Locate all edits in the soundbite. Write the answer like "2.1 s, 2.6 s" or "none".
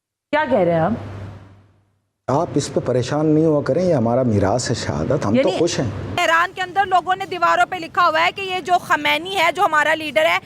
6.1 s